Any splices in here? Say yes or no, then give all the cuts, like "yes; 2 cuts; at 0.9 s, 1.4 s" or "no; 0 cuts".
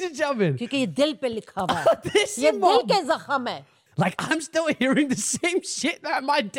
yes; 1 cut; at 3.8 s